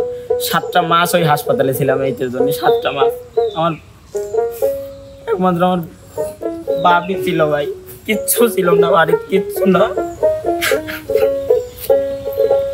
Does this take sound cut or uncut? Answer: uncut